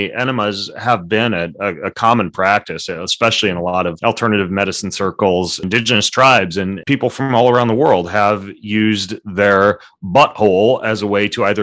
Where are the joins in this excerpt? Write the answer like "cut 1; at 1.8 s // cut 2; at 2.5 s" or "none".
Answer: cut 1; at 4.0 s // cut 2; at 5.6 s // cut 3; at 6.8 s